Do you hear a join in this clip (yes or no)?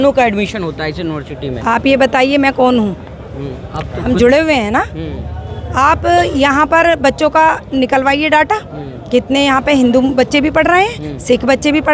no